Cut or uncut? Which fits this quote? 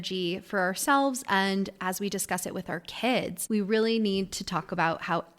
cut